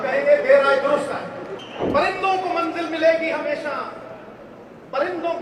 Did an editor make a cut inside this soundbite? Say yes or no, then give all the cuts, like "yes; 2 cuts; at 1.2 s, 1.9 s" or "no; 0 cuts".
yes; 1 cut; at 1.6 s